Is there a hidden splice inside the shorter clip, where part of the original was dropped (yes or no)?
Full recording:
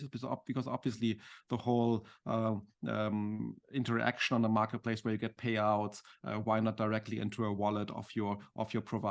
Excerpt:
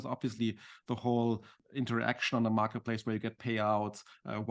yes